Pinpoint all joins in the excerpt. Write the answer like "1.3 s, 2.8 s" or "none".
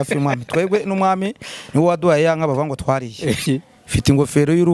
3.4 s